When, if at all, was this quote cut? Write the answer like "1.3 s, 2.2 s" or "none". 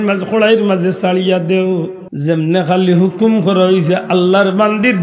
2.0 s